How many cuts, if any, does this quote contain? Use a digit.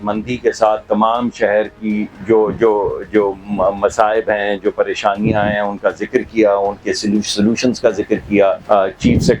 0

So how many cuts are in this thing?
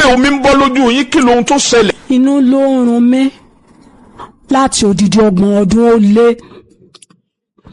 1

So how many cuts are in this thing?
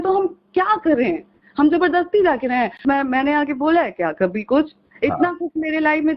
1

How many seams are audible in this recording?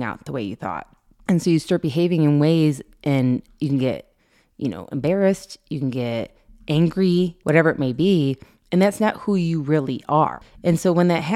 2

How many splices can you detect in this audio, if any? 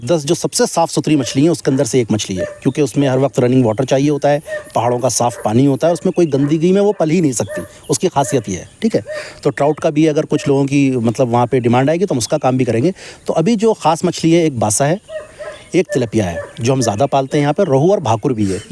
0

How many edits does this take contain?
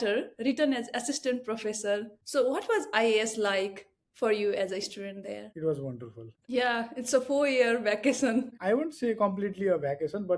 2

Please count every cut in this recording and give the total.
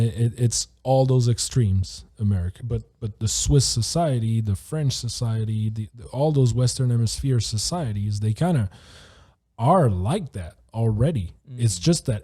1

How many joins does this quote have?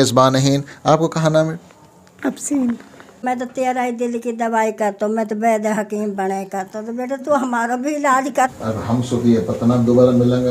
2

